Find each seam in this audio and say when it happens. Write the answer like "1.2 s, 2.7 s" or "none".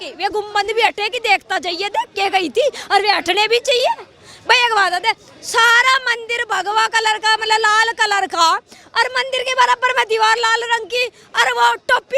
none